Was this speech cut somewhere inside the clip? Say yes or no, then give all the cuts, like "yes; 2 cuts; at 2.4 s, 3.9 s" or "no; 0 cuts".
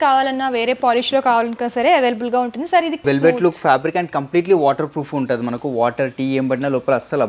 yes; 1 cut; at 3.0 s